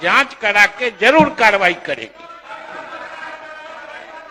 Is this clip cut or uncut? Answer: uncut